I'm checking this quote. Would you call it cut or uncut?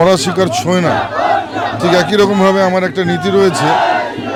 uncut